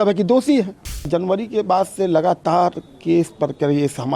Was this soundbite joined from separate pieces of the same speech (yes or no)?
yes